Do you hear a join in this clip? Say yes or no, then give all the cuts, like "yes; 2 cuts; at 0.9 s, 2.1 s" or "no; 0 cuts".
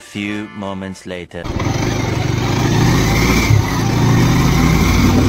no; 0 cuts